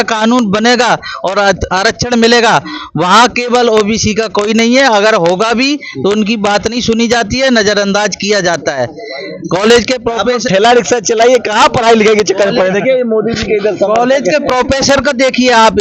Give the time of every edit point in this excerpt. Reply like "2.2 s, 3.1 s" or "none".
none